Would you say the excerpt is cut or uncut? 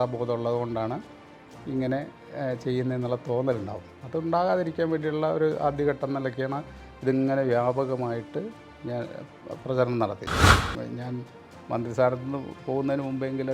cut